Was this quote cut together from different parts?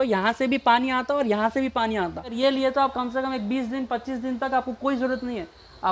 yes; 1 cut; at 2.3 s

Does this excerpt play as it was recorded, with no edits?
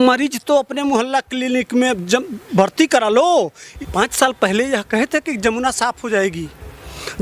no; 1 cut; at 3.6 s

